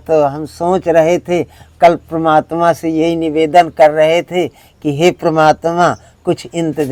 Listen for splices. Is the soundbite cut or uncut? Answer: uncut